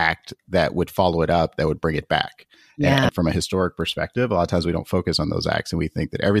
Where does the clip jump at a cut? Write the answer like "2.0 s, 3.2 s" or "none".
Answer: 3.1 s